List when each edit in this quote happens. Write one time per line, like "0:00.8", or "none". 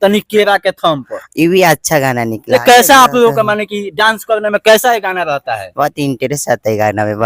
none